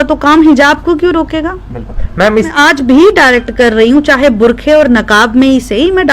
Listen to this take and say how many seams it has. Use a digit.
1